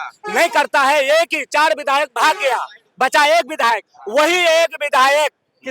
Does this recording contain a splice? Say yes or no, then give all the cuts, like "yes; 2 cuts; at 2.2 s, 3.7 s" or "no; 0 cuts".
no; 0 cuts